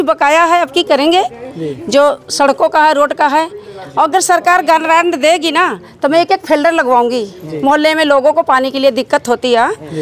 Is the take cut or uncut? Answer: uncut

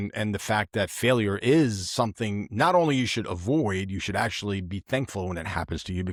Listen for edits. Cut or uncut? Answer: uncut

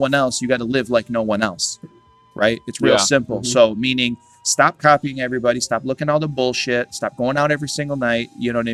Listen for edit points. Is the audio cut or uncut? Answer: uncut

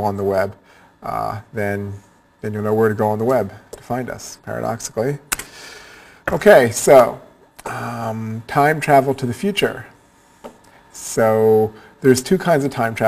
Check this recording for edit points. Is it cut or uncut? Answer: uncut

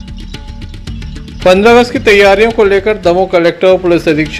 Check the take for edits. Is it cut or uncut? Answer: uncut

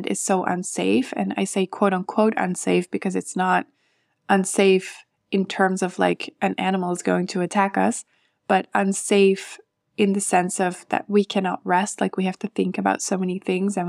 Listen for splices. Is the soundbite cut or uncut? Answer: uncut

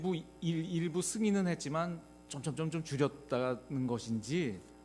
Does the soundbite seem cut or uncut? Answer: cut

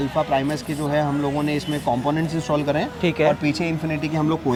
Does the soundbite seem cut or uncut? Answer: uncut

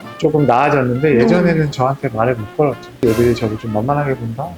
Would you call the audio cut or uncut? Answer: cut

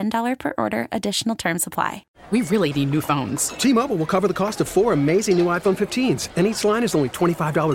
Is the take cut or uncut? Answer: cut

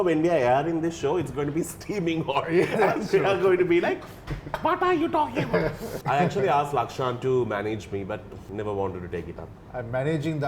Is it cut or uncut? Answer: cut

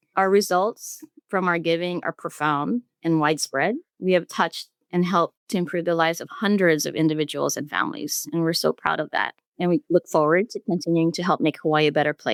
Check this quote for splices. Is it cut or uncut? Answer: uncut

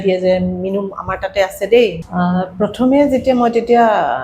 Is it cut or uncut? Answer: cut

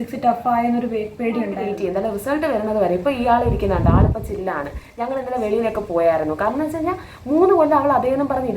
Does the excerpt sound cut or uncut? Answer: cut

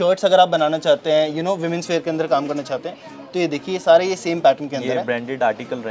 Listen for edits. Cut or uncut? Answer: uncut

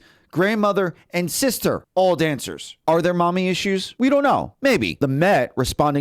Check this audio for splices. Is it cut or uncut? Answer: cut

